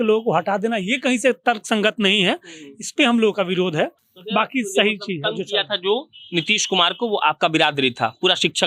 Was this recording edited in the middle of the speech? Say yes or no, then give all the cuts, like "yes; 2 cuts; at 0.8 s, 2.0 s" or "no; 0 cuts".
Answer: no; 0 cuts